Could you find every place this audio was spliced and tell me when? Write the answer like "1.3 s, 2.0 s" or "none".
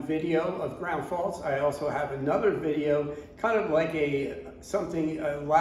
none